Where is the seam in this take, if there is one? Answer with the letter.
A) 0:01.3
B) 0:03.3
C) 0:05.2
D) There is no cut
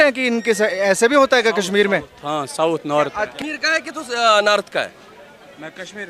B